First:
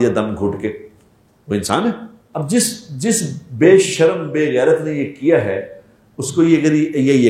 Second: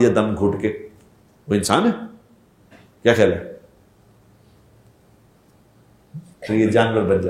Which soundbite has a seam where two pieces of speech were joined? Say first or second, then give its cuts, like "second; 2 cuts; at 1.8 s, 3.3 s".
first; 1 cut; at 2.1 s